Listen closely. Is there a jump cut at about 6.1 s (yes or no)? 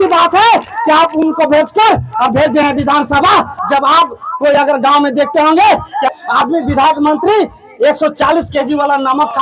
yes